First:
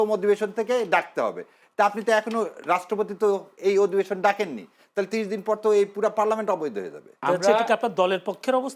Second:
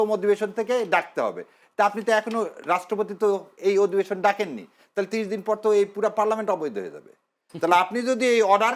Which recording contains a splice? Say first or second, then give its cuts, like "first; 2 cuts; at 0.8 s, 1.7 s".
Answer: first; 1 cut; at 7.2 s